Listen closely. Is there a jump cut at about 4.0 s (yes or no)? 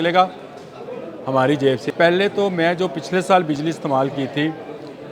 no